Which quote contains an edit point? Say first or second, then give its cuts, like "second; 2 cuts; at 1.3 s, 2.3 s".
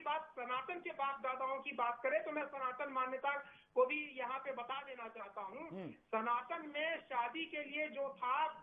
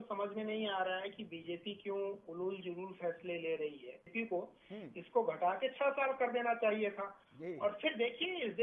second; 1 cut; at 4.1 s